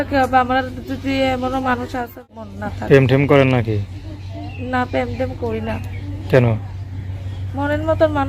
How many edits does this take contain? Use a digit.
1